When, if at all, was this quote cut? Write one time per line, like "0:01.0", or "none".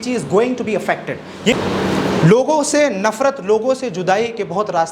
0:01.5